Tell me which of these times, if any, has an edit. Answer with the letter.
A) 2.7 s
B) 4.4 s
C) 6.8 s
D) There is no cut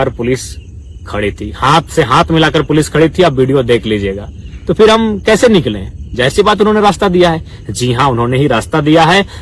D